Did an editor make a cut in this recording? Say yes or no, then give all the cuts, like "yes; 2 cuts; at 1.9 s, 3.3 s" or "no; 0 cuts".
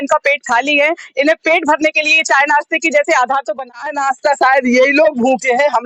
yes; 1 cut; at 3.6 s